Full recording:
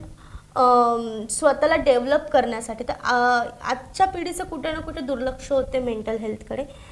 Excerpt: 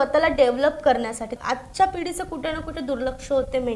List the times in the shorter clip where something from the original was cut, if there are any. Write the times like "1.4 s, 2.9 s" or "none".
1.4 s